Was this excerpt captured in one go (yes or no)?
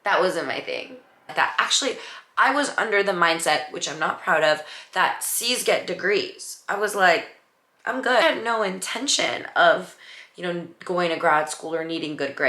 no